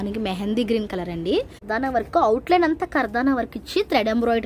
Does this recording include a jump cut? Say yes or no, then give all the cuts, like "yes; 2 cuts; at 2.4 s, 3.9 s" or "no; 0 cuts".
yes; 1 cut; at 1.6 s